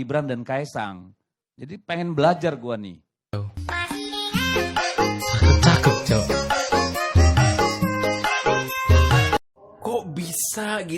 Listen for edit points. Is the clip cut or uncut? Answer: uncut